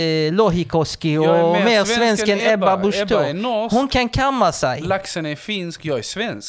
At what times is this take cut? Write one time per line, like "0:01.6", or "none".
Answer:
none